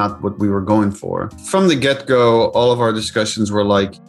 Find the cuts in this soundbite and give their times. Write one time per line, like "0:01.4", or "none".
0:01.3